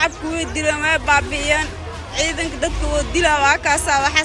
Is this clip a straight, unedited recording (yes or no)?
yes